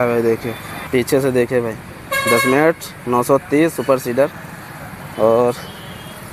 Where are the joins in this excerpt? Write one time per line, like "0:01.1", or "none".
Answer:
none